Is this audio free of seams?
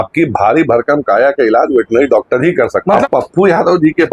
no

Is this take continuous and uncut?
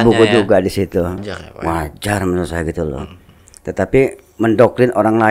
no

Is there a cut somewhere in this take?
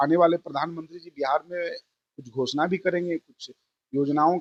no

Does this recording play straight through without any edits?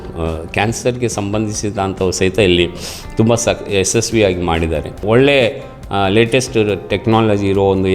no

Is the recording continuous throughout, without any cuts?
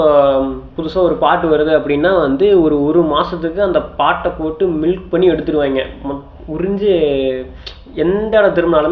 yes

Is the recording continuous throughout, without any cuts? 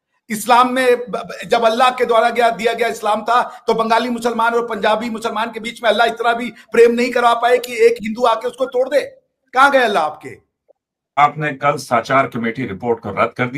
no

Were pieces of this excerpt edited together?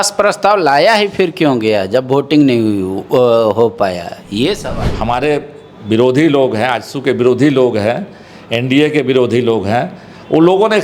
yes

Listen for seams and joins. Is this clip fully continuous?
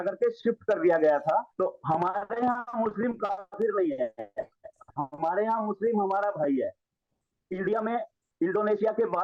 no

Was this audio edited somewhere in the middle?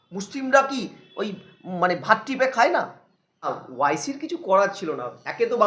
yes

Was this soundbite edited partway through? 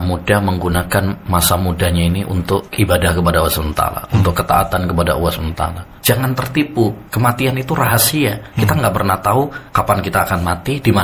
yes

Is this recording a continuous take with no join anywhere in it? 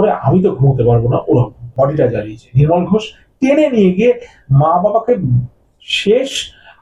no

